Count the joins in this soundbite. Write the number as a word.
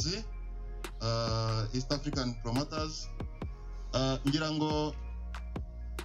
one